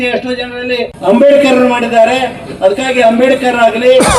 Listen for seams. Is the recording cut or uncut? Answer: cut